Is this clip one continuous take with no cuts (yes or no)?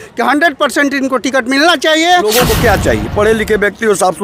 no